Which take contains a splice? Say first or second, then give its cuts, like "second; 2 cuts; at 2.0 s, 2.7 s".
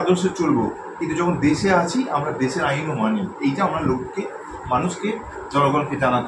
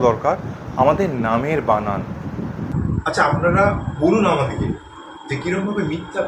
second; 1 cut; at 2.7 s